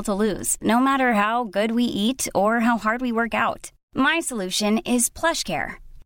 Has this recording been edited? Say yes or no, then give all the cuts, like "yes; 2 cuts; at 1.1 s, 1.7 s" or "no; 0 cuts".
no; 0 cuts